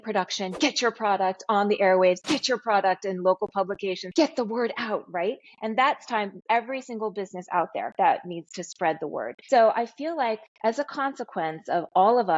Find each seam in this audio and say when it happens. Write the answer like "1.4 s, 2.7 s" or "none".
4.0 s, 9.3 s